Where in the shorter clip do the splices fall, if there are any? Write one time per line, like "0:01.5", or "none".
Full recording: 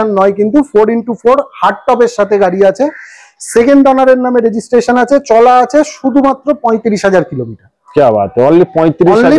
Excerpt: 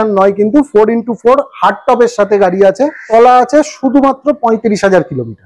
0:03.1